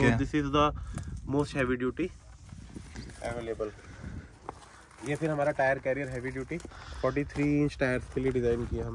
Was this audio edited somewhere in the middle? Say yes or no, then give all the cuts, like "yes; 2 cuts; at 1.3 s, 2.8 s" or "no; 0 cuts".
no; 0 cuts